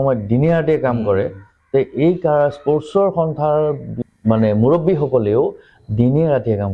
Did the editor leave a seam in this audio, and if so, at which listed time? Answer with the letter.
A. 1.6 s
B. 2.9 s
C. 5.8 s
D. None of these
D